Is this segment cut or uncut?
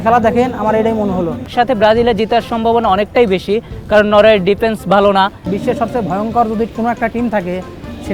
cut